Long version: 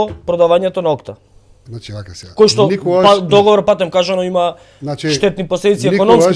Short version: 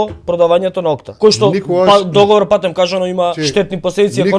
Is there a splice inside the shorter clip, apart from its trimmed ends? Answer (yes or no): yes